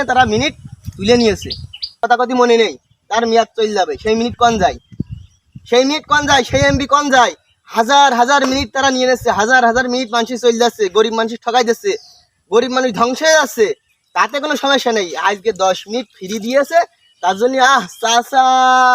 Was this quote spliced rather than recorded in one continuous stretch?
yes; 1 cut; at 2.0 s

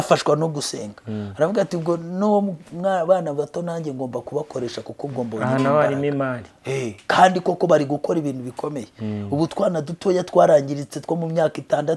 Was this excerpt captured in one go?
yes; 0 cuts

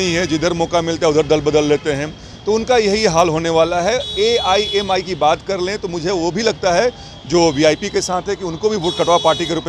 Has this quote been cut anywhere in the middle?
no; 0 cuts

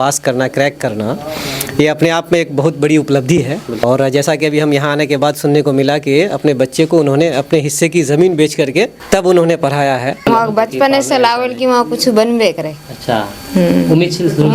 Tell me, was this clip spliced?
yes; 3 cuts; at 3.8 s, 9.0 s, 10.2 s

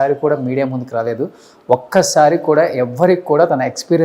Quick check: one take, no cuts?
yes; 0 cuts

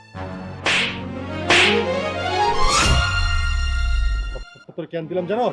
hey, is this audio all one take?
yes; 0 cuts

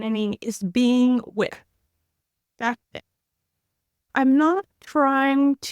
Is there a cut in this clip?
yes; 1 cut; at 4.0 s

